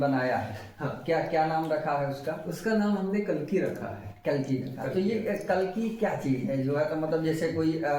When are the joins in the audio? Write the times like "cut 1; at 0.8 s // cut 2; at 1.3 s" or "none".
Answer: none